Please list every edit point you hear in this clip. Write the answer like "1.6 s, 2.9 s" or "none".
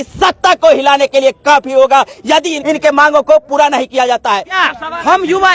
2.5 s, 4.7 s